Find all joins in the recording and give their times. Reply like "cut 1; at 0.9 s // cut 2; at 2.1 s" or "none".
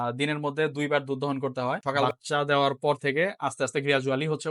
cut 1; at 2.1 s